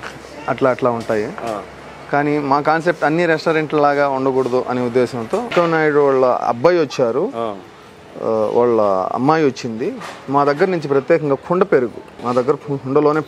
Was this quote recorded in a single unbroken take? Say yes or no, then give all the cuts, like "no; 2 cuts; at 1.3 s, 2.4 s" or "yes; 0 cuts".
no; 2 cuts; at 5.5 s, 12.1 s